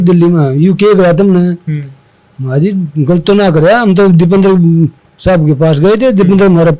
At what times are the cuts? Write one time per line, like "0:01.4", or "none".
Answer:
none